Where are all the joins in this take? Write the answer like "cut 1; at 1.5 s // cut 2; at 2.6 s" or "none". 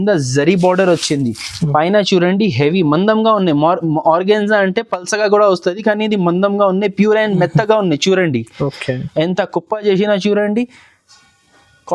none